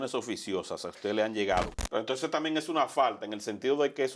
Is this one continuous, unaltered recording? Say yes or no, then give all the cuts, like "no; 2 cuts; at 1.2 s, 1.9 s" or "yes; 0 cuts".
no; 1 cut; at 1.8 s